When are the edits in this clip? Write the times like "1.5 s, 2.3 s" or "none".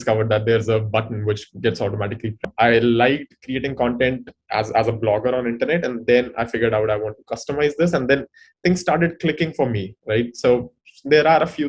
2.5 s